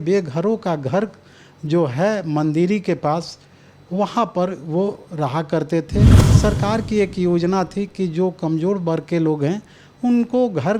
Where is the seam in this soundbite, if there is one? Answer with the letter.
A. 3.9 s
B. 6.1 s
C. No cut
B